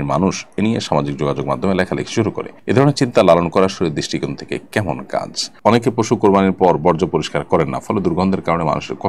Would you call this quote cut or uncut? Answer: cut